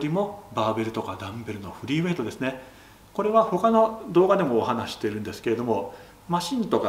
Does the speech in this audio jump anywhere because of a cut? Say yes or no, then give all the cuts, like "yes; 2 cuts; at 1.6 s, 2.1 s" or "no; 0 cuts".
no; 0 cuts